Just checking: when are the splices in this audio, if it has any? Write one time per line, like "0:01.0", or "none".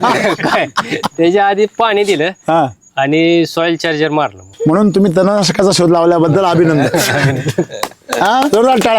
0:04.4